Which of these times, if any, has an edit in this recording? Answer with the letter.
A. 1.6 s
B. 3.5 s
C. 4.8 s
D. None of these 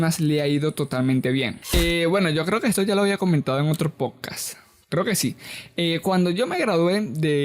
A